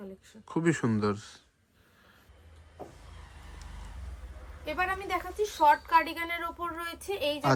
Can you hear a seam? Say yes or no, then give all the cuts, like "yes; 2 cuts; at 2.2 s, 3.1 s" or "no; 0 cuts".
no; 0 cuts